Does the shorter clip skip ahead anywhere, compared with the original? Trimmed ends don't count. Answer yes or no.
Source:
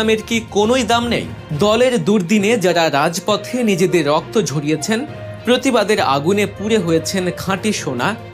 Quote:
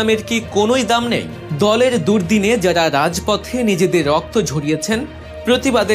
no